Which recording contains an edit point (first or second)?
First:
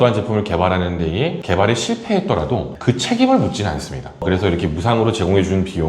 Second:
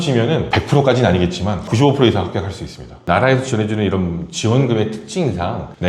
second